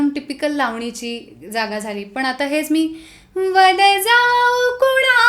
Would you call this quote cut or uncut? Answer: uncut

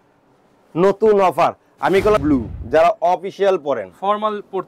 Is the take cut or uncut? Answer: cut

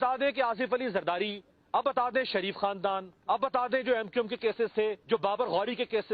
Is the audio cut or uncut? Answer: cut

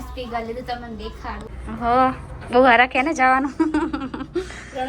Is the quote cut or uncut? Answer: cut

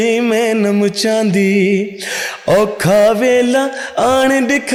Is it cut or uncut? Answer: uncut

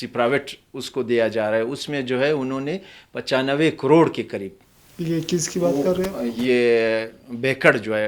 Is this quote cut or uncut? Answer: uncut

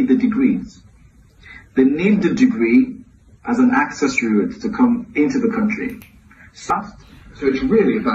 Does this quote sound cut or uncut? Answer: cut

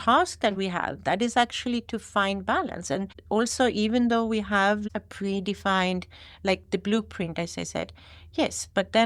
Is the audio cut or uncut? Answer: cut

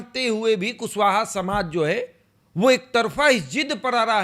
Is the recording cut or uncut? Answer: uncut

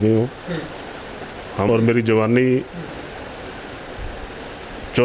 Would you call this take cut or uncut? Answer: cut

